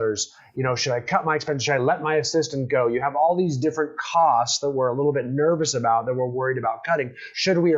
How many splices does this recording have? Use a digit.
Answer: 0